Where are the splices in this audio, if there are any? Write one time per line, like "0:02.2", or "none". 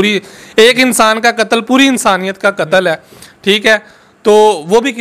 none